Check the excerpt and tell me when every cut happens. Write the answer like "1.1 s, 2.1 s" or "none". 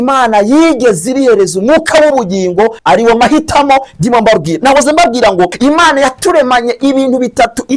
2.8 s, 5.5 s